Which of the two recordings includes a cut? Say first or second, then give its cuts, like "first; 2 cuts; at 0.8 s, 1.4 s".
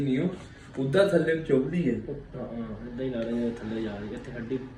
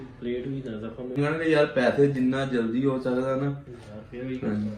second; 1 cut; at 1.2 s